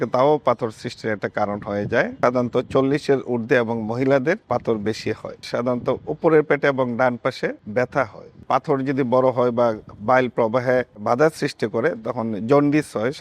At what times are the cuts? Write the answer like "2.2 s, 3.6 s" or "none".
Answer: 2.1 s, 4.4 s, 5.5 s, 7.6 s, 8.4 s, 11.0 s